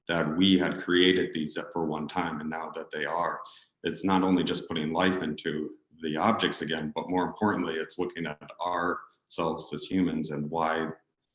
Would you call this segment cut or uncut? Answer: uncut